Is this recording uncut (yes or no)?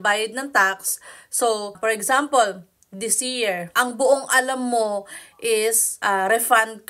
no